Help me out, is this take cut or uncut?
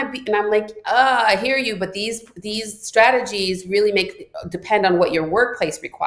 uncut